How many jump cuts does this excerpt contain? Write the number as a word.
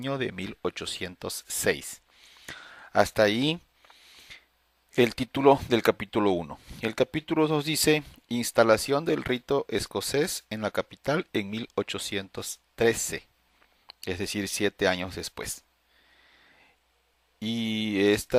zero